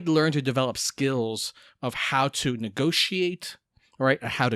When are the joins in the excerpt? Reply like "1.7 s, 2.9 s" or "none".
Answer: none